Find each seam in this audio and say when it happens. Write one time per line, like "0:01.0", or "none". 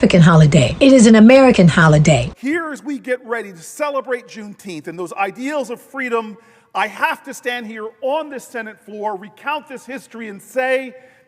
0:02.3